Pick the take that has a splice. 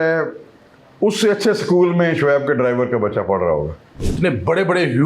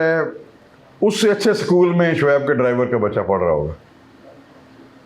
first; 1 cut; at 4.1 s

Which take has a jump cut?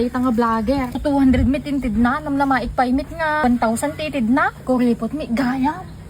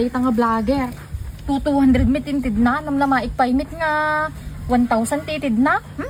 first; 3 cuts; at 1.0 s, 3.4 s, 4.5 s

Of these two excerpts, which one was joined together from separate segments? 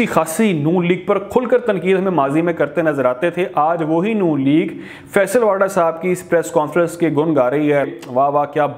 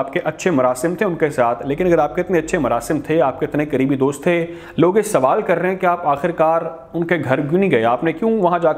first; 1 cut; at 7.8 s

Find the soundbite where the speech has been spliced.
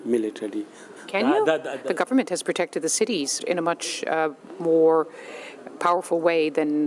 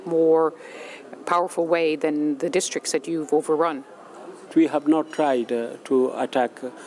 first; 1 cut; at 0.9 s

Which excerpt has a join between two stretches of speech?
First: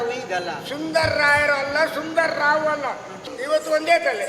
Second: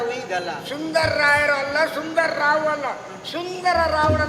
first; 1 cut; at 3.2 s

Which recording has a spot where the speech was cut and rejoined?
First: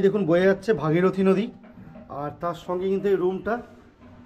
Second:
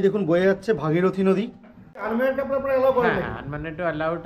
second; 1 cut; at 2.0 s

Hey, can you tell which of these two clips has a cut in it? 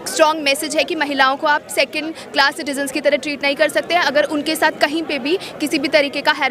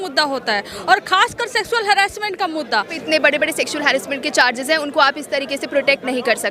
second; 1 cut; at 3.0 s

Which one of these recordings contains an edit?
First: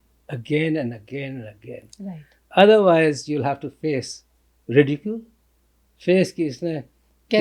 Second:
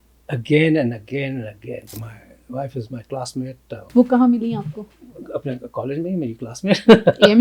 second; 2 cuts; at 1.9 s, 3.9 s

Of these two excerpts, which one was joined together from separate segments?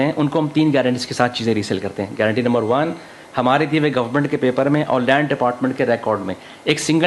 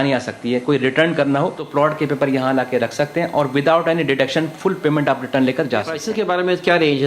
second; 2 cuts; at 1.6 s, 6.0 s

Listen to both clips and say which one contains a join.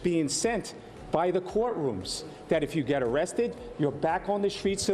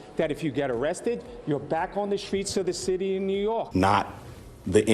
second; 1 cut; at 3.7 s

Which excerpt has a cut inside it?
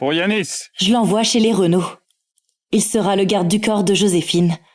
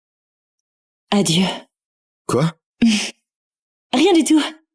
second; 1 cut; at 2.6 s

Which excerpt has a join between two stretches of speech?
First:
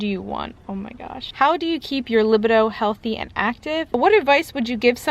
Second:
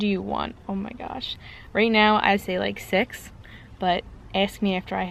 first; 2 cuts; at 1.3 s, 3.9 s

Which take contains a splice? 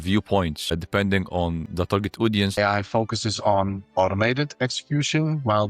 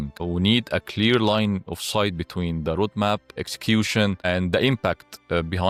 first; 1 cut; at 2.6 s

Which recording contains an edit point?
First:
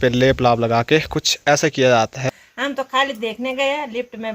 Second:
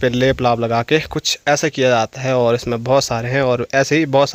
first; 1 cut; at 2.2 s

